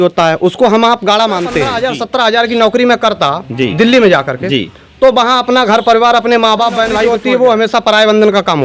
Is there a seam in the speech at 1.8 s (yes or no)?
yes